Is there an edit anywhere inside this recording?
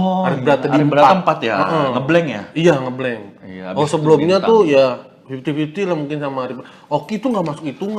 no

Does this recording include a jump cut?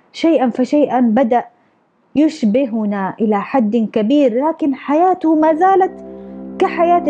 no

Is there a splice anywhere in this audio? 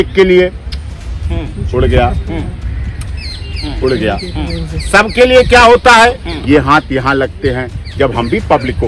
no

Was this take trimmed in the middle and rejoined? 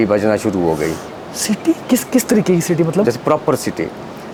no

